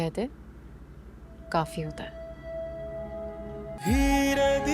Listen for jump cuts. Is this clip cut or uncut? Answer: cut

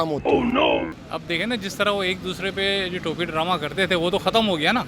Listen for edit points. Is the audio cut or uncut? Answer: uncut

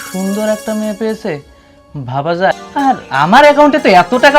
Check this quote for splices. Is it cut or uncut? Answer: cut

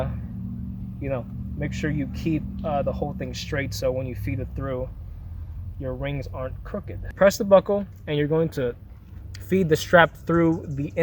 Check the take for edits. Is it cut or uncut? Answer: cut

